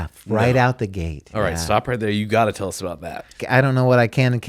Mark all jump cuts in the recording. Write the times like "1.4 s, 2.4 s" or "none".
3.4 s

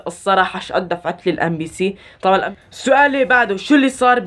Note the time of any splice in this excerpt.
2.3 s

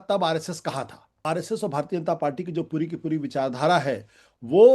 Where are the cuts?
1.2 s

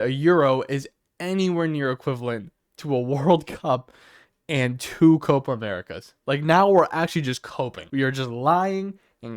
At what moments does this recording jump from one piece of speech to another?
7.8 s

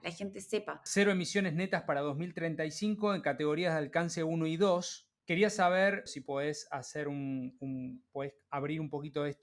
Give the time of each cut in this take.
0.9 s, 5.1 s, 6.1 s

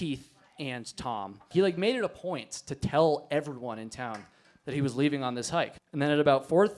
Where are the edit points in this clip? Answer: 1.5 s, 5.8 s

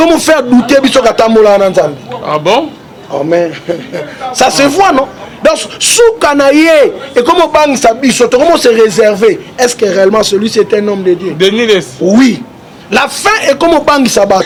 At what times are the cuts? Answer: none

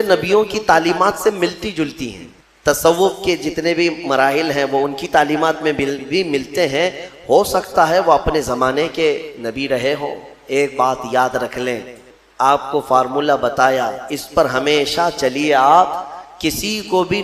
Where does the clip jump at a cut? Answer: 2.4 s, 12.1 s

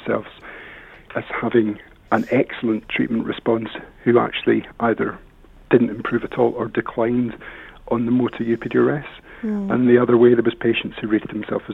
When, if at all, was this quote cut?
1.0 s, 1.9 s

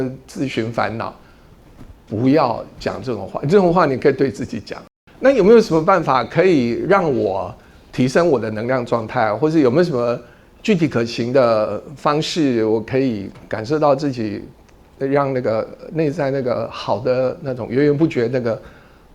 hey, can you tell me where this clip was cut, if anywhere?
4.8 s

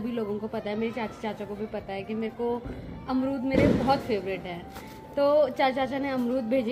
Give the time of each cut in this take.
none

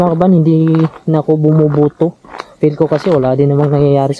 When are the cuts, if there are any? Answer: 2.4 s

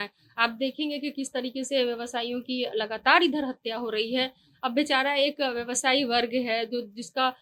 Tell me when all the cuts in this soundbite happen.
none

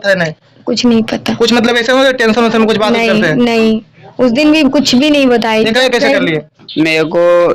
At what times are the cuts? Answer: 6.6 s

